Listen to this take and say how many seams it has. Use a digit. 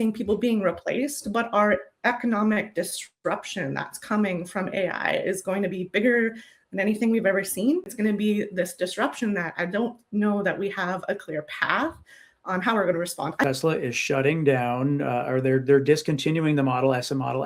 2